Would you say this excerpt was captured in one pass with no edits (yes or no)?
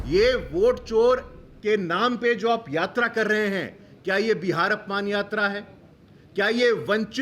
yes